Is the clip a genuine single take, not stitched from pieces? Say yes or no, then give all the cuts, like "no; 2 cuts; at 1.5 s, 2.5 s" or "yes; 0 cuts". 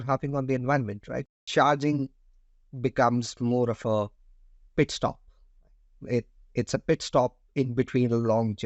no; 1 cut; at 1.3 s